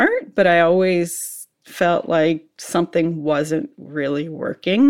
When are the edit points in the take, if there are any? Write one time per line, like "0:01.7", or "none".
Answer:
none